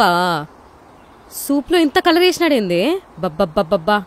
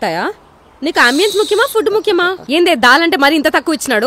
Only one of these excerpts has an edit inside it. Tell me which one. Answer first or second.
second